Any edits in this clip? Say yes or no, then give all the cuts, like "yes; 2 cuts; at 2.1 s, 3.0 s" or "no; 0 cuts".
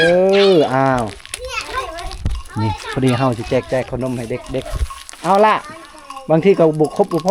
no; 0 cuts